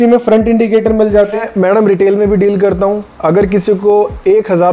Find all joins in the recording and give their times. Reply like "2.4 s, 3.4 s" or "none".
1.5 s